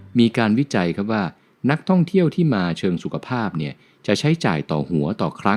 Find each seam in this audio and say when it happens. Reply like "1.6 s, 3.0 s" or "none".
none